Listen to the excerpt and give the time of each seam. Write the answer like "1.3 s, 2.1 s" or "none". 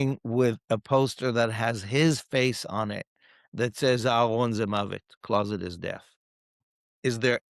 6.6 s